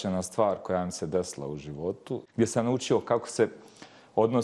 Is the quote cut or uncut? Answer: cut